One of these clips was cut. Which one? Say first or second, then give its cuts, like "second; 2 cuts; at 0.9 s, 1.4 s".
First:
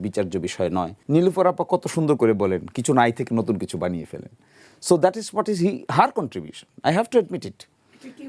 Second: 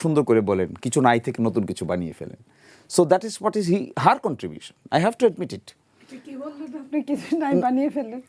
first; 1 cut; at 1.0 s